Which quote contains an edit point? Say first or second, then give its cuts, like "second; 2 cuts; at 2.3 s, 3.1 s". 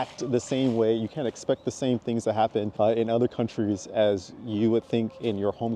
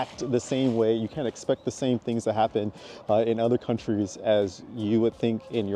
first; 1 cut; at 2.7 s